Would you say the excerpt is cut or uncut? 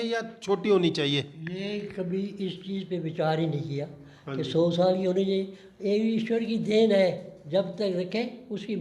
uncut